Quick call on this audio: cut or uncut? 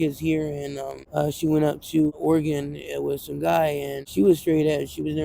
cut